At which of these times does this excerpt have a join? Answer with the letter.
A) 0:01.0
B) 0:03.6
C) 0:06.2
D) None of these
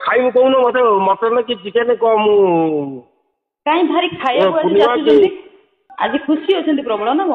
C